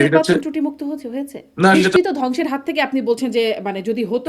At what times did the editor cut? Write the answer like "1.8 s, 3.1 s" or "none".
1.8 s